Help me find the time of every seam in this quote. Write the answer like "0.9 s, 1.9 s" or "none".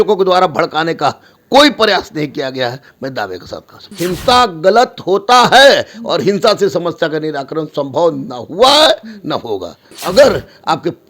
3.8 s, 9.9 s